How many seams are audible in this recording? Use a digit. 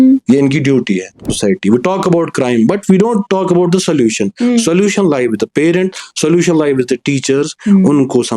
1